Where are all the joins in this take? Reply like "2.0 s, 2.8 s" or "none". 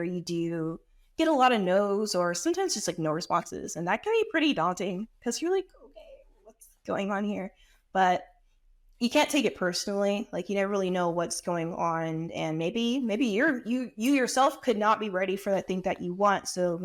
none